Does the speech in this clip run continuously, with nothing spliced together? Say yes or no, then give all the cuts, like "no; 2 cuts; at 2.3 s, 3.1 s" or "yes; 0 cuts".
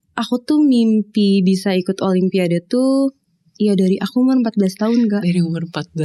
yes; 0 cuts